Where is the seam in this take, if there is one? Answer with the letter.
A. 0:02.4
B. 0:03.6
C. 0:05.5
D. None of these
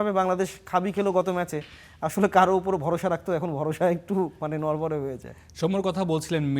D